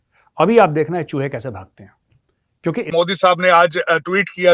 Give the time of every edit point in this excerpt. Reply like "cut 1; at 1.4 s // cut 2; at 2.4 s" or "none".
cut 1; at 2.9 s

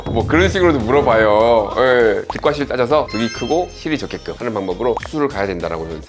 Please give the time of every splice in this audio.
cut 1; at 2.3 s // cut 2; at 4.3 s

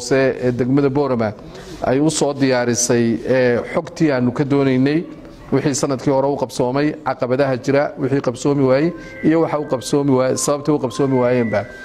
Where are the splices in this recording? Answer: none

